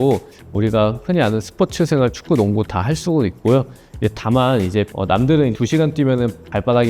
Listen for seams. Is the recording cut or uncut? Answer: uncut